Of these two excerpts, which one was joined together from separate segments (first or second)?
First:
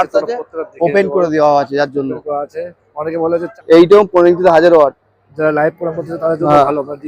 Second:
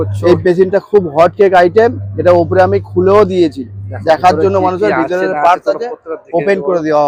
first